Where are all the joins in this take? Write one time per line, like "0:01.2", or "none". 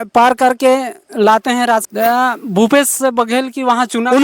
0:01.9